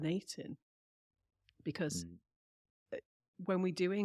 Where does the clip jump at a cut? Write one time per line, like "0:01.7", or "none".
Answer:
none